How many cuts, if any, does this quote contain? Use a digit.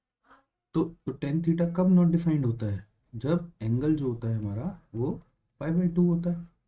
1